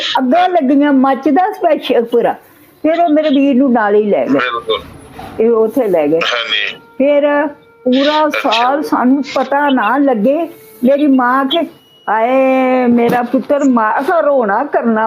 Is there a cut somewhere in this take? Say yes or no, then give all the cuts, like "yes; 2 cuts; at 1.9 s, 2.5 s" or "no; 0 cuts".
no; 0 cuts